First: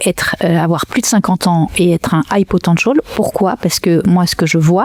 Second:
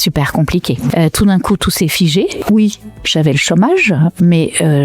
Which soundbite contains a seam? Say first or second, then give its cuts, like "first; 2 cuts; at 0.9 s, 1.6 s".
second; 2 cuts; at 0.9 s, 2.4 s